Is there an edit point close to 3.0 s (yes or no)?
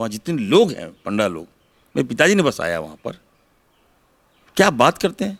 no